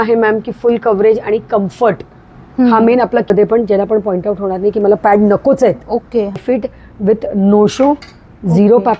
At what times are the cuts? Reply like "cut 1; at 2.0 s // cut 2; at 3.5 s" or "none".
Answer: cut 1; at 3.3 s // cut 2; at 6.4 s